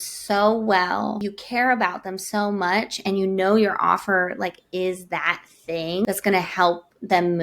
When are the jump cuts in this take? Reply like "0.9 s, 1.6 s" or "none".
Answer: 1.3 s, 6.0 s